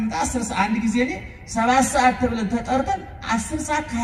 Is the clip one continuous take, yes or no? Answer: yes